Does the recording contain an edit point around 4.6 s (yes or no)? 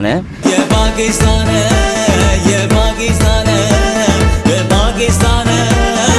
no